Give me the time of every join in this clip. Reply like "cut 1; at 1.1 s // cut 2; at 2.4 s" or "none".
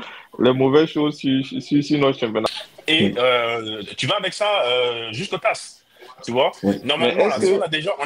cut 1; at 2.5 s